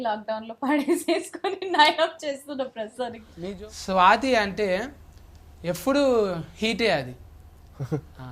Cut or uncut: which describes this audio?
cut